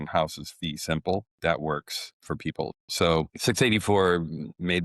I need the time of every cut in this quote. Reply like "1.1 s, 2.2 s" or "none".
1.3 s, 2.8 s